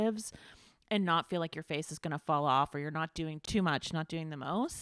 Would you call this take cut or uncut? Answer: uncut